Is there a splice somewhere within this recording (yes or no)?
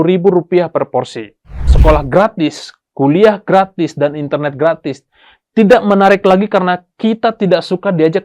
yes